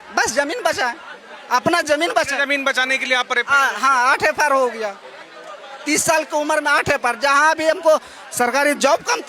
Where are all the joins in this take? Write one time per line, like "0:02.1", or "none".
none